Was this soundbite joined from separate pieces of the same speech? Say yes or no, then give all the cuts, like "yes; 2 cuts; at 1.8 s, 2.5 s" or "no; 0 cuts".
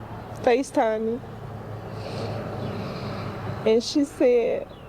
no; 0 cuts